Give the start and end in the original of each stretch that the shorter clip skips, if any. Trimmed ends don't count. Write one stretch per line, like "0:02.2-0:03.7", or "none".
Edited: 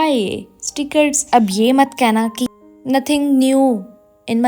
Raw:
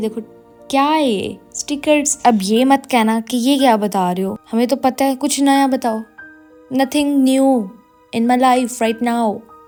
0:03.3-0:06.3